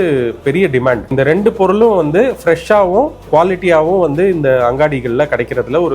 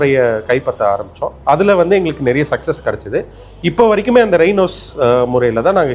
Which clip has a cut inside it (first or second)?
first